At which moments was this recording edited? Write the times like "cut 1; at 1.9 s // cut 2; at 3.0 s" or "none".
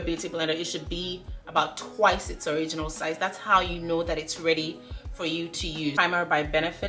cut 1; at 6.0 s

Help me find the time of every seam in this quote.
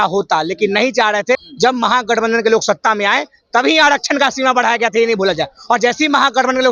cut 1; at 1.4 s

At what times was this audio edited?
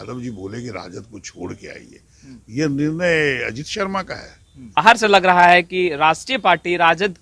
cut 1; at 4.8 s

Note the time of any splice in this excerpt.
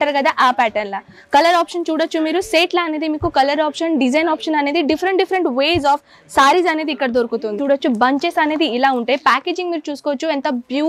cut 1; at 7.6 s

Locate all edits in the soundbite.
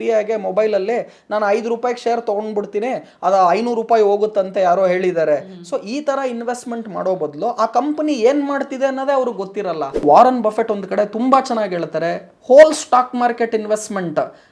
cut 1; at 10.0 s

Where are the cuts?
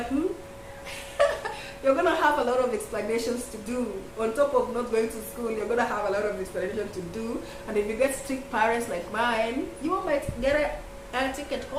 none

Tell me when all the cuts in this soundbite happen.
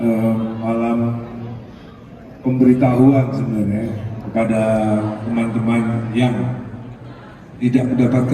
none

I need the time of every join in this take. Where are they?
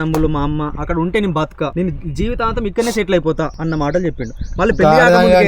cut 1; at 1.7 s // cut 2; at 3.6 s

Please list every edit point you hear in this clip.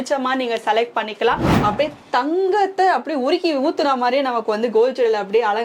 cut 1; at 1.5 s

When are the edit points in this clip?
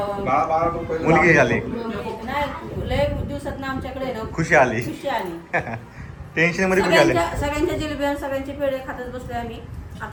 none

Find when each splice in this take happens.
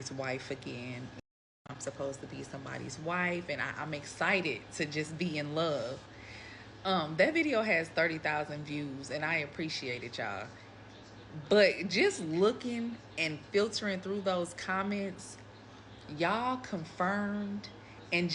cut 1; at 1.6 s

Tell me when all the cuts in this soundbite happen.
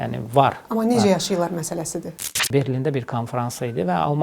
cut 1; at 2.3 s

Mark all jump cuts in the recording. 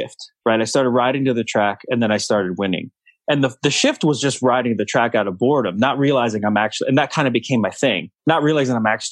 cut 1; at 8.1 s

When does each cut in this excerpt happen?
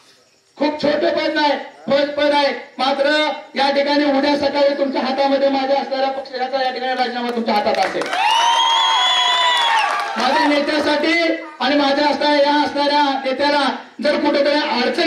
none

